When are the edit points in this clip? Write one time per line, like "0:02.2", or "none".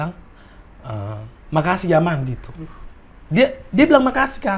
none